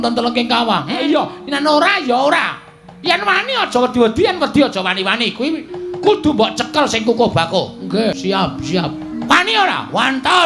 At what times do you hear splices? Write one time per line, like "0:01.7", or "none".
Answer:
0:01.0
0:08.1